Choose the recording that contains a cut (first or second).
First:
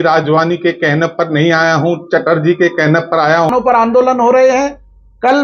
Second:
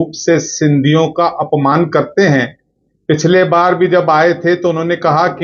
first